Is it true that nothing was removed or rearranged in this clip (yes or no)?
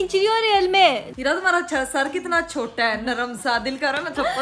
no